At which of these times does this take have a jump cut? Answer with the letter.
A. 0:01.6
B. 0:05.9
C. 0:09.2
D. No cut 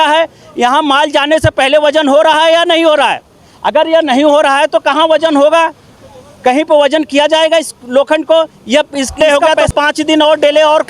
C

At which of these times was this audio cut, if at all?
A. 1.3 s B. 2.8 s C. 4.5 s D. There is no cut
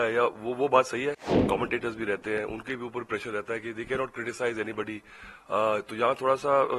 A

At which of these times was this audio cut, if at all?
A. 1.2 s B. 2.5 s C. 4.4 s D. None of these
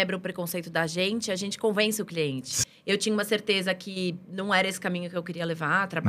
B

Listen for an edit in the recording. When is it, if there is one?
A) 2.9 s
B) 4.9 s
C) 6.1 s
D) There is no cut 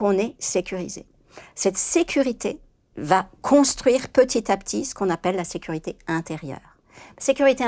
A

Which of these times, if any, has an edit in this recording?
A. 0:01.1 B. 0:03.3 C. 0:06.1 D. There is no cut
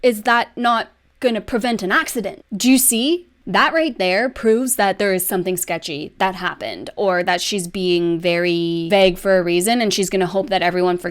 B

